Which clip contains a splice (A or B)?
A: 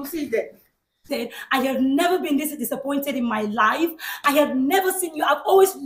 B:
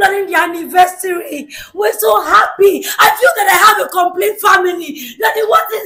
A